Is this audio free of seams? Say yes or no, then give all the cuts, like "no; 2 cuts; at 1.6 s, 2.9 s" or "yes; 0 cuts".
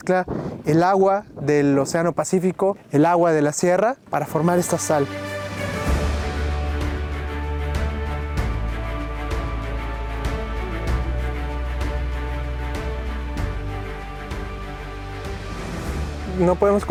yes; 0 cuts